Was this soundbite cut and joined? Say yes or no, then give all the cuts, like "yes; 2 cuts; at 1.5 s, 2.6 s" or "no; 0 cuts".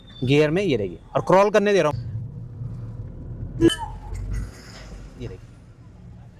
no; 0 cuts